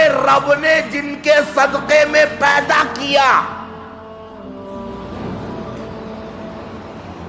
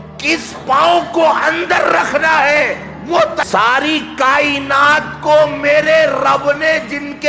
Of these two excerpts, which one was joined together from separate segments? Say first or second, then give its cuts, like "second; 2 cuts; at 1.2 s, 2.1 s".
second; 1 cut; at 3.4 s